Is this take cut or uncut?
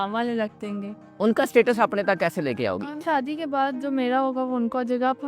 cut